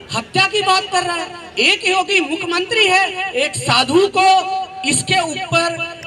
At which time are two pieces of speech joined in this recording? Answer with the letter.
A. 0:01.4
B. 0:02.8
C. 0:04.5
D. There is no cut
D